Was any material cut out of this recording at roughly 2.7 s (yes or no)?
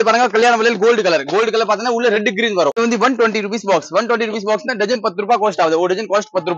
yes